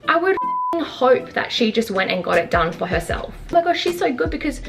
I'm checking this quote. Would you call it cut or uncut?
cut